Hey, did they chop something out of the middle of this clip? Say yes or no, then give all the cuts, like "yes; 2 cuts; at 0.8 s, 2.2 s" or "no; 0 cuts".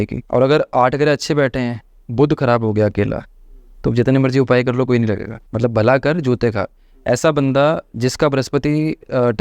yes; 1 cut; at 5.4 s